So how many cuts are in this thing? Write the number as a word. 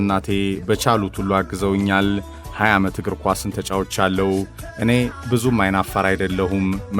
one